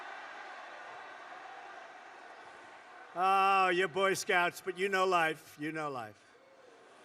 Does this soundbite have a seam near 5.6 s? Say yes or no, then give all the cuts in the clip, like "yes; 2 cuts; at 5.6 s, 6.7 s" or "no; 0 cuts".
no; 2 cuts; at 1.7 s, 2.8 s